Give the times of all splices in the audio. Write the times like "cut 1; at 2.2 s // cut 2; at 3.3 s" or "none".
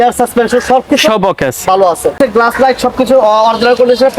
cut 1; at 2.2 s